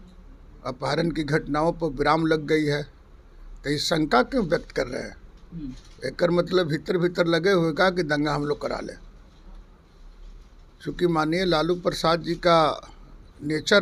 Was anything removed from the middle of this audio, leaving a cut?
no; 0 cuts

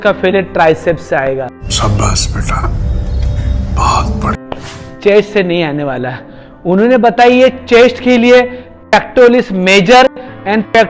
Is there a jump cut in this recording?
no; 0 cuts

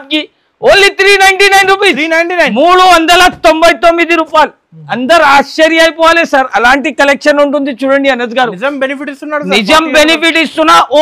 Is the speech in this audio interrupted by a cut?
no; 0 cuts

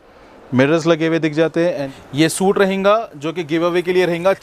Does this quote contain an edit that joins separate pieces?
yes; 1 cut; at 1.9 s

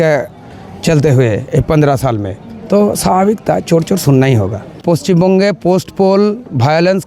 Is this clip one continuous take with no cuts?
no; 1 cut; at 4.8 s

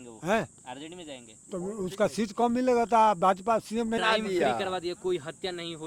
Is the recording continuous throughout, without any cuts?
no; 1 cut; at 4.0 s

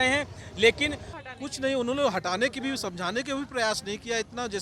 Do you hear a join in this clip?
yes; 1 cut; at 1.1 s

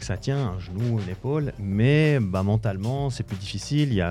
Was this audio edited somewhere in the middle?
no; 0 cuts

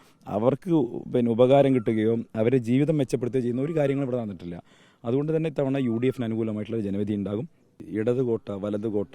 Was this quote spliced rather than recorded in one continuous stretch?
yes; 1 cut; at 7.8 s

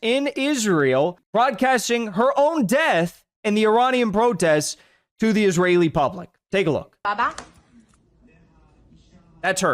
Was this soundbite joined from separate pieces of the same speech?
yes; 1 cut; at 1.2 s

